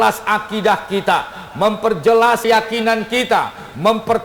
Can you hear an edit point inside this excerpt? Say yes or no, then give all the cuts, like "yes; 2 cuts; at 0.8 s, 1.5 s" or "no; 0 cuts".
yes; 1 cut; at 2.5 s